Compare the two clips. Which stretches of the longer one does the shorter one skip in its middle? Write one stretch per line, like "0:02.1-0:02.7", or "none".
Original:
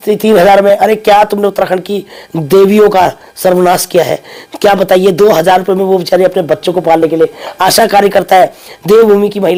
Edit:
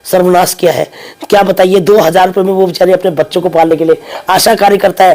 none